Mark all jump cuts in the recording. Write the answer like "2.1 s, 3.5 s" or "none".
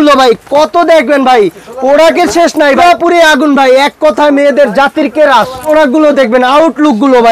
2.8 s, 5.6 s